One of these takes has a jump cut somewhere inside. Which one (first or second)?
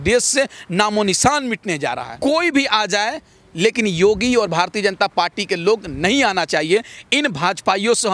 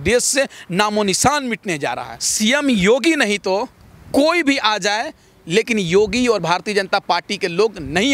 first